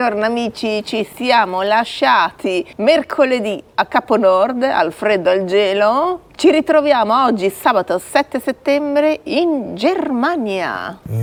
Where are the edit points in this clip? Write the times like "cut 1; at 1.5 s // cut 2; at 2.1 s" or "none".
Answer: none